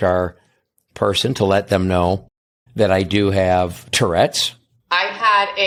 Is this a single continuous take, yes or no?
yes